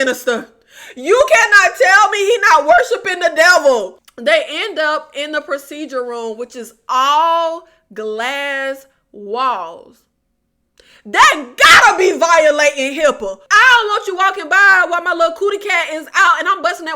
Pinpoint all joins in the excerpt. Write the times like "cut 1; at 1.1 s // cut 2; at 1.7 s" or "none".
cut 1; at 4.0 s // cut 2; at 13.4 s